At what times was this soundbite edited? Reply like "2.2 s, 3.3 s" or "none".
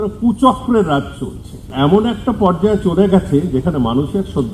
1.7 s